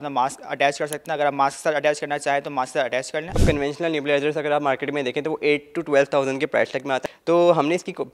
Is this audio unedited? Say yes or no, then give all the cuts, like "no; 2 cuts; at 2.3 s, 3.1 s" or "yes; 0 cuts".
no; 2 cuts; at 3.4 s, 7.0 s